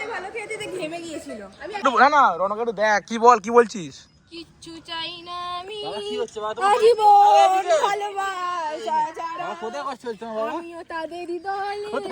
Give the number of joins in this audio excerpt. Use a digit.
1